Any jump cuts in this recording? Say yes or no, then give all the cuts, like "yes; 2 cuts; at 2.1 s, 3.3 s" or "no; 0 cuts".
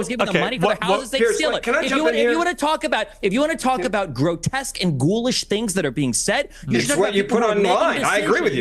yes; 1 cut; at 3.5 s